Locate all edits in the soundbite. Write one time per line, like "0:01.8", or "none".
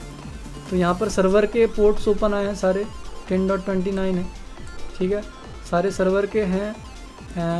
none